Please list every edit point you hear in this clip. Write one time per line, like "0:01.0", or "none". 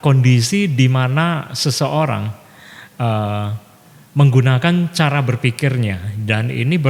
none